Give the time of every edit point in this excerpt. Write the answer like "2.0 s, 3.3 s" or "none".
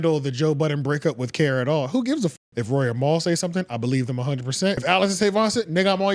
2.3 s, 4.8 s